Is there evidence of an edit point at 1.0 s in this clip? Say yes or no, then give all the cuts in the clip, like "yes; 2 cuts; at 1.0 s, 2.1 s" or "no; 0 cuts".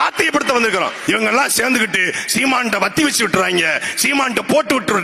yes; 1 cut; at 1.0 s